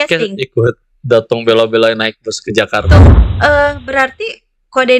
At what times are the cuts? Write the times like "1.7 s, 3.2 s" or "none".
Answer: 3.0 s